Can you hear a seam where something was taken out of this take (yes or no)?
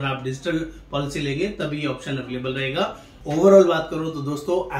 yes